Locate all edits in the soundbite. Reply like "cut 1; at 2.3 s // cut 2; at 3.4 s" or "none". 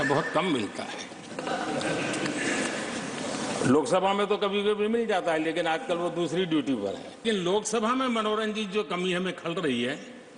cut 1; at 7.2 s